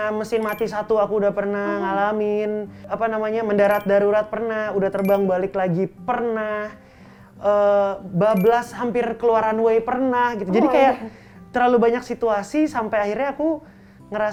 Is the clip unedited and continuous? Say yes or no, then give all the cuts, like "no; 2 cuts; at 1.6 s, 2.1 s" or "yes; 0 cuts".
yes; 0 cuts